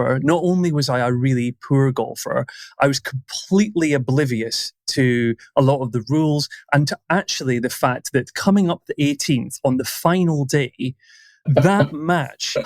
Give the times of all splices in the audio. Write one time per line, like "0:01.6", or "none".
0:11.4